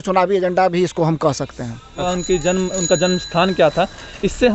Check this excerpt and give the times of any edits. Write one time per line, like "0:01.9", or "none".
0:02.0